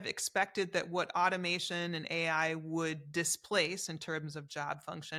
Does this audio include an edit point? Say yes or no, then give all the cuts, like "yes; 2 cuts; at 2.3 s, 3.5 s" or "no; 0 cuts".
no; 0 cuts